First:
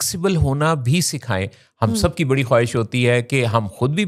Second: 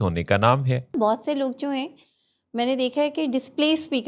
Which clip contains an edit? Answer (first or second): second